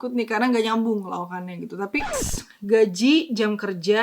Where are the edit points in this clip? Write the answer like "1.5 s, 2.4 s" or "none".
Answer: 2.1 s